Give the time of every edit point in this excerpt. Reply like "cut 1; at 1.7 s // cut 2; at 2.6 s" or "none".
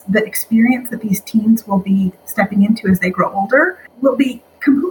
cut 1; at 3.8 s